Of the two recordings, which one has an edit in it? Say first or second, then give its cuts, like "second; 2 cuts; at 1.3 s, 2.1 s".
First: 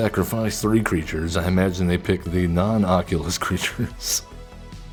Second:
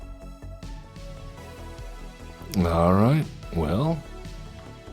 second; 1 cut; at 0.9 s